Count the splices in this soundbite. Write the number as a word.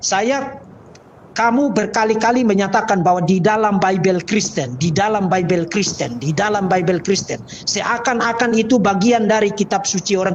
zero